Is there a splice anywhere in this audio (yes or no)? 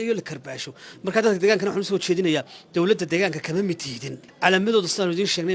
yes